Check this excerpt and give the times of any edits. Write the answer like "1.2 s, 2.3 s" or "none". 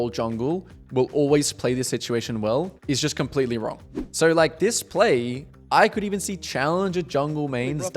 2.8 s, 4.0 s